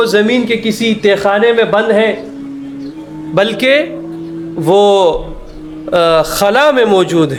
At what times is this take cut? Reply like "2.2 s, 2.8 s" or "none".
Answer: none